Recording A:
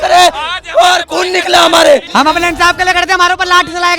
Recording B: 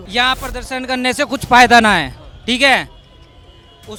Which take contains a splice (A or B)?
A